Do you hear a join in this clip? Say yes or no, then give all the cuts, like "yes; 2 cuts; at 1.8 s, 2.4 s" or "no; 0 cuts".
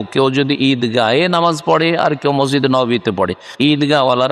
no; 0 cuts